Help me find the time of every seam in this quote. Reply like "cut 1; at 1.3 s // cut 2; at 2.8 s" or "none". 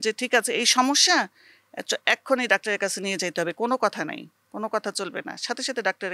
none